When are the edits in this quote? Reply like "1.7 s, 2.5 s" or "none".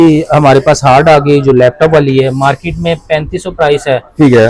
none

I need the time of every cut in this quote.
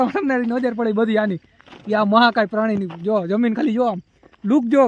none

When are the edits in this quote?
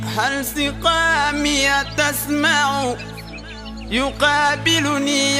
none

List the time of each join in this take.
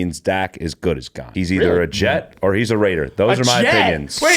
1.2 s

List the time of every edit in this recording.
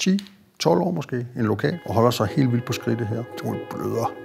1.8 s, 3.3 s

